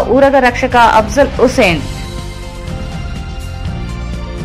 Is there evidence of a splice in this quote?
no; 0 cuts

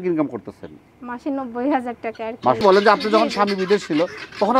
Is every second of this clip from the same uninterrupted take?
no; 1 cut; at 2.6 s

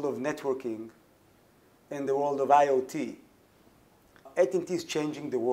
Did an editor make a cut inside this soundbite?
yes; 1 cut; at 4.3 s

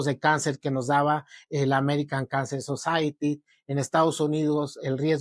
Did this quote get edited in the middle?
no; 0 cuts

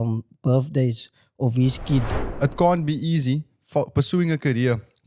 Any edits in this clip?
yes; 1 cut; at 2.2 s

